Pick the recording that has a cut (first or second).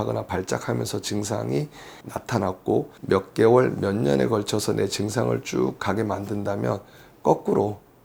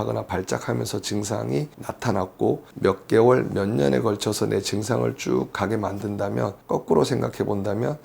second